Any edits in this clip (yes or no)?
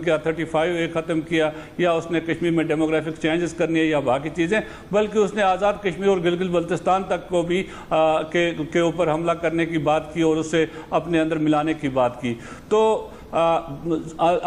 no